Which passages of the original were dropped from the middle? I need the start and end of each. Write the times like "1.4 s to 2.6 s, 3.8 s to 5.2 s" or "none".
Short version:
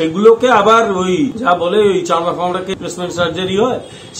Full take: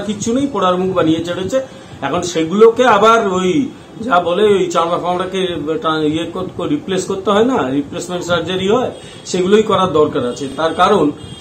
3.7 s to 4.0 s, 5.4 s to 7.9 s